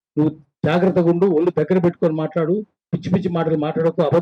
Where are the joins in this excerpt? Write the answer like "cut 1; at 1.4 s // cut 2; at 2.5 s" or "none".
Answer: none